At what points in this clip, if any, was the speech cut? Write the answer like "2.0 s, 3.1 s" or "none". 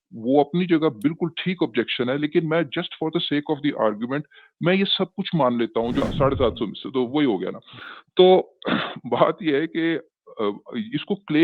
6.0 s